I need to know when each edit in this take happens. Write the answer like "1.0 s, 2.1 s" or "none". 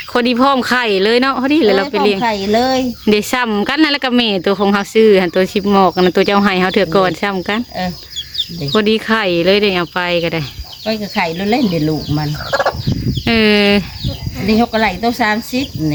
none